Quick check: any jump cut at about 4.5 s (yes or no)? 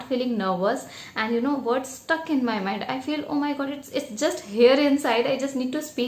no